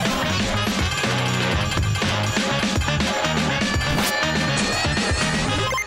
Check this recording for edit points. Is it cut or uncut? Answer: uncut